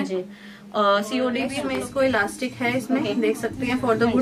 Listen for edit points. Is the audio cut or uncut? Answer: cut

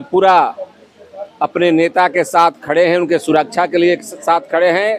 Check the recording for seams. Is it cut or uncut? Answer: uncut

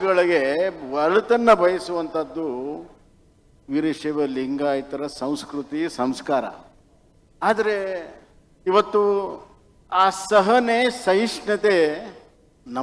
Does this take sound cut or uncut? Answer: uncut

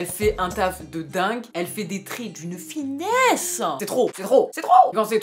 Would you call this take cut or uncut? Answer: cut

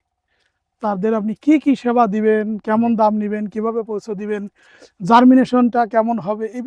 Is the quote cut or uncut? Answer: uncut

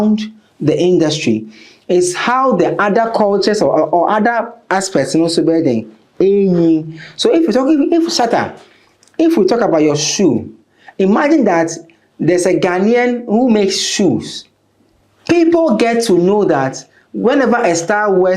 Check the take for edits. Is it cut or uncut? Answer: uncut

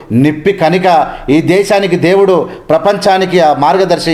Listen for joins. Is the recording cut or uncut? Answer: uncut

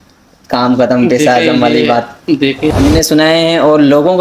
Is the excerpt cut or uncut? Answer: cut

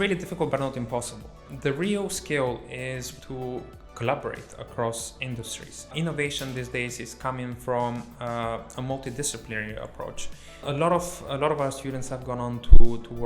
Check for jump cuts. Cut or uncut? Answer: cut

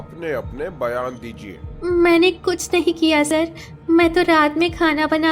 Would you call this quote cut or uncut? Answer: cut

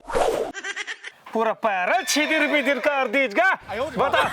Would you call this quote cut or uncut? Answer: cut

